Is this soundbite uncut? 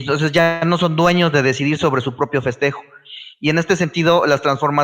no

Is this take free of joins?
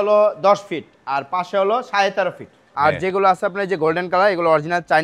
no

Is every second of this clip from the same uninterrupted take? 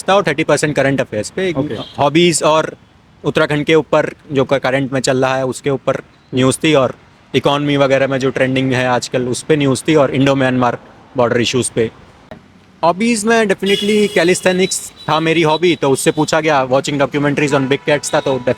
no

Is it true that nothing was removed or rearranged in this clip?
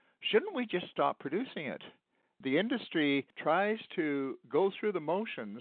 no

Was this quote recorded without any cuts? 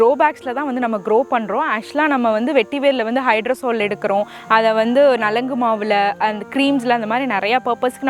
yes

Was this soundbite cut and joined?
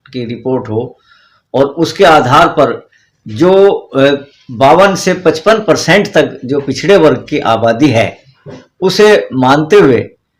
no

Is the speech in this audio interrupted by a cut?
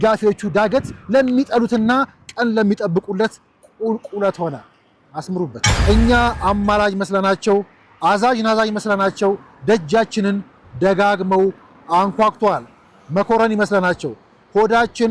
yes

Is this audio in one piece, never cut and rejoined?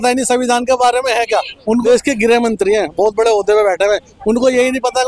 no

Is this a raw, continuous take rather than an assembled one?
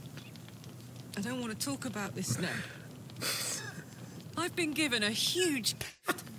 yes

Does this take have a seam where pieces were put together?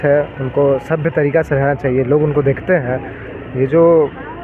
no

